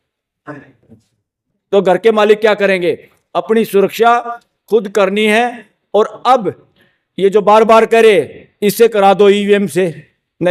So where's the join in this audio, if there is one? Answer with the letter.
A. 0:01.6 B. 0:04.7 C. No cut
C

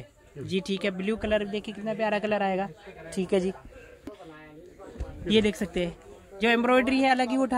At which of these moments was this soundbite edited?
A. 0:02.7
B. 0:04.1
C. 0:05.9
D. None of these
B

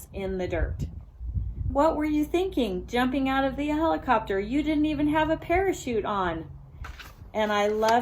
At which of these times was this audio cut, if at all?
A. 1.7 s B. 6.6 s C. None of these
A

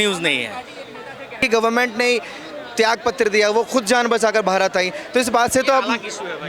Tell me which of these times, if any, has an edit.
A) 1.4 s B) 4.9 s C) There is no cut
A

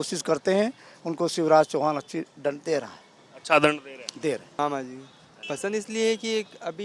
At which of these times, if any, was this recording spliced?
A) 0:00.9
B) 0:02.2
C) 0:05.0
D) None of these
C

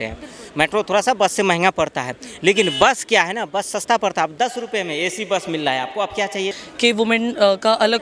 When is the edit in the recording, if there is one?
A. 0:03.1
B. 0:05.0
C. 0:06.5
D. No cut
C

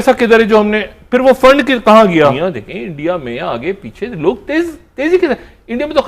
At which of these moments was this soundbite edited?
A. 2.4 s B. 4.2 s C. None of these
A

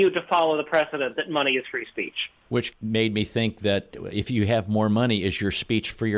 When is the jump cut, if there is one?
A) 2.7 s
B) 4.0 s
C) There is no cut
A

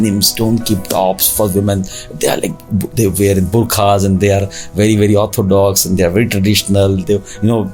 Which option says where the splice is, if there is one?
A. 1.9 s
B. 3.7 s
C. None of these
C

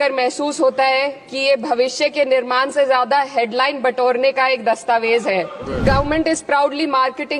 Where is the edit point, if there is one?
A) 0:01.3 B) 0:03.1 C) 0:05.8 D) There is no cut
C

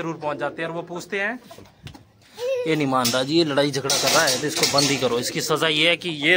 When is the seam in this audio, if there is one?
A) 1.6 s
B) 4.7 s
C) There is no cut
A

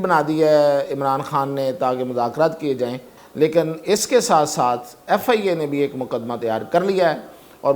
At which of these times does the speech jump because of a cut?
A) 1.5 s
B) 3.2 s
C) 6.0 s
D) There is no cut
B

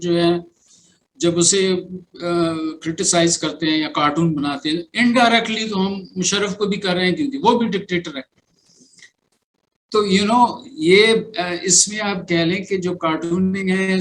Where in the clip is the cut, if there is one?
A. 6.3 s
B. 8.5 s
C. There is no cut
C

